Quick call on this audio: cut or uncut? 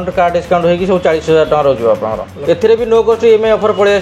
cut